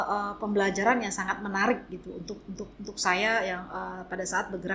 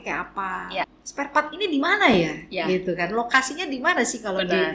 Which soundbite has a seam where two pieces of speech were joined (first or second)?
second